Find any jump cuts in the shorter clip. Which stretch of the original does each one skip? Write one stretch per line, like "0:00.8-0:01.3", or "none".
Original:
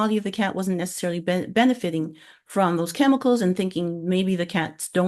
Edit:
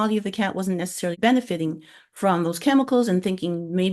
0:01.1-0:01.5